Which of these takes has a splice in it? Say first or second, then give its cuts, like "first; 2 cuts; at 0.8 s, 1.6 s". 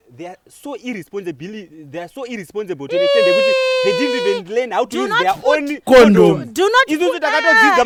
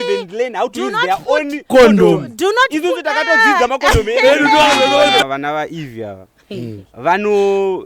second; 1 cut; at 5.2 s